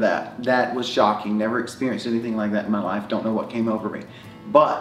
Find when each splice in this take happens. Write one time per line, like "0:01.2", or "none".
none